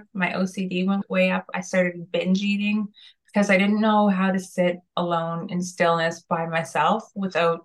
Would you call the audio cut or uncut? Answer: cut